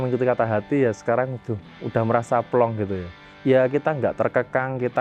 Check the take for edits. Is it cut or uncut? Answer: uncut